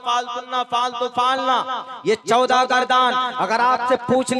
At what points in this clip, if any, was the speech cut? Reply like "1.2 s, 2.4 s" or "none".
none